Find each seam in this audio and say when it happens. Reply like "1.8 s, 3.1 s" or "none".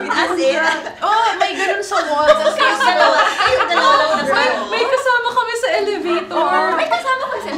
none

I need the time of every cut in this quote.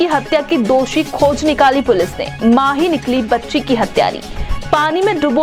none

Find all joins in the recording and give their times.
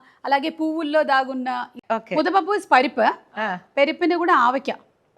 1.8 s

